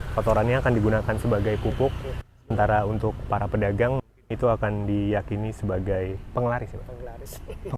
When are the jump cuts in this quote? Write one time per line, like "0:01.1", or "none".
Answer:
none